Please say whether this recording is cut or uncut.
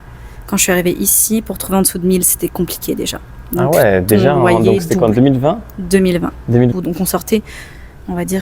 cut